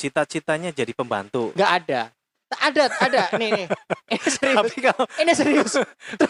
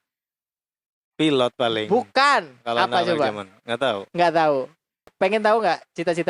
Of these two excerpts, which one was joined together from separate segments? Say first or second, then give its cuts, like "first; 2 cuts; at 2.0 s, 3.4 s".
second; 1 cut; at 5.1 s